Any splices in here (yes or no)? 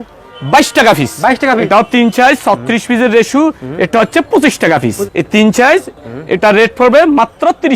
yes